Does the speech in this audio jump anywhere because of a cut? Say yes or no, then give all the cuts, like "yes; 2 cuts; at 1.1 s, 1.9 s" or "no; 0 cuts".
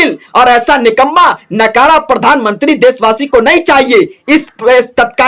no; 0 cuts